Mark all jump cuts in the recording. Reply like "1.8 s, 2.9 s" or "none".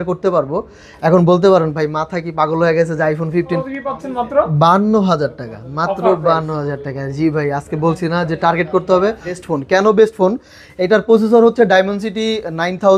3.6 s, 9.4 s